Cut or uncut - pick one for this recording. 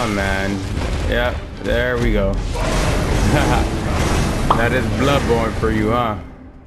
uncut